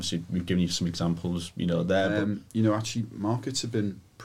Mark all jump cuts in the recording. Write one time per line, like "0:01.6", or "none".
0:02.2